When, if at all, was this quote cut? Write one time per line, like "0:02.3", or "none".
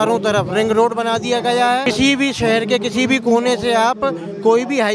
none